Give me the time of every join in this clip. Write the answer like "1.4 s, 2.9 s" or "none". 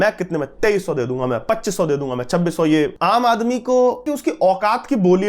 2.9 s, 4.1 s